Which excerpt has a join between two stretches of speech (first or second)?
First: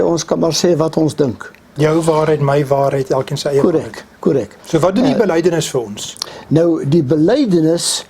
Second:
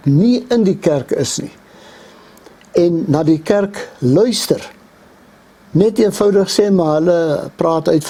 first